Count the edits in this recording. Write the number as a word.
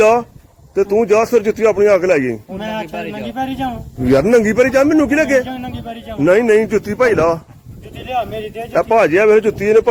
zero